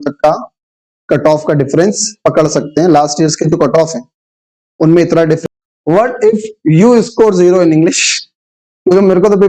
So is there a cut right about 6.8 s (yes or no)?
no